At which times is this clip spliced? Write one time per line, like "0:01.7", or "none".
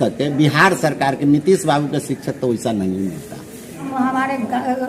0:03.9